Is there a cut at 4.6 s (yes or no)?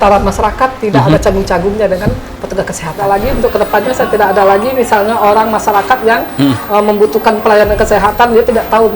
no